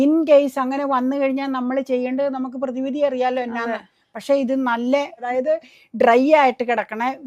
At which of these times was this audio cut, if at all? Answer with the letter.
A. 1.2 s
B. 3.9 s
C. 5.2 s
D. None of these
D